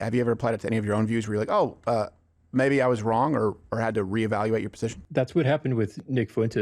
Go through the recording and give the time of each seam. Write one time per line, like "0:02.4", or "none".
0:05.0